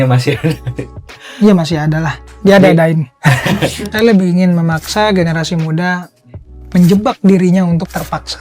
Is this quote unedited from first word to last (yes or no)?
no